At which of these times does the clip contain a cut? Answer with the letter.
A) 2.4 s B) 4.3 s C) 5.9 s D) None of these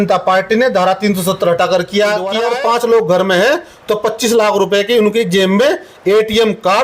A